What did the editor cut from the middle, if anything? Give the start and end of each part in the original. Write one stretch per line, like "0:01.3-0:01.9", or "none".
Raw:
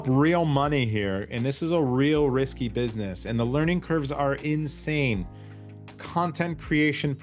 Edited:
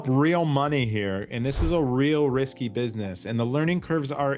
none